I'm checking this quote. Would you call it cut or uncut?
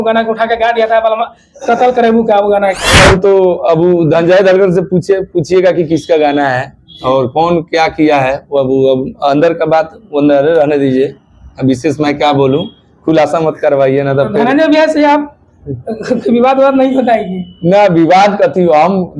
cut